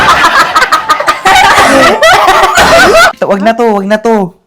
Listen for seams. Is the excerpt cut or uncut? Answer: cut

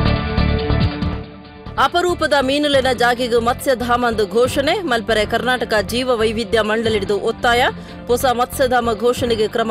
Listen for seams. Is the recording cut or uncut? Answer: uncut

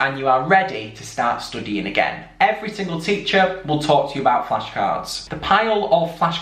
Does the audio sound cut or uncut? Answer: cut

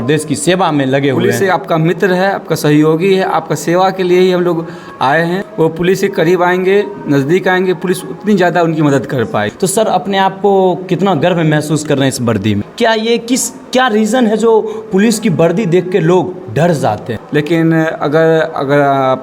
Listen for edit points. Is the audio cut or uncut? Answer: cut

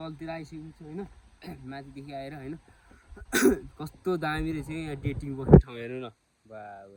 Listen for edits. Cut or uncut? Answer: uncut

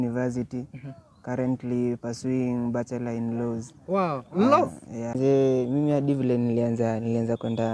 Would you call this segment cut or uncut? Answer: cut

